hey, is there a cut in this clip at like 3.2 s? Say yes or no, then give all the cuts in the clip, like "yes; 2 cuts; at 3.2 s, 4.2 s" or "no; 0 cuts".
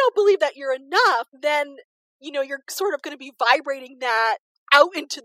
no; 1 cut; at 1.3 s